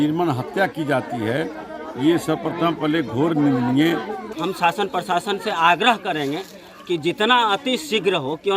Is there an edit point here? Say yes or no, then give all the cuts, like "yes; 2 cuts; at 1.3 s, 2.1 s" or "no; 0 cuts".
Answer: yes; 1 cut; at 4.4 s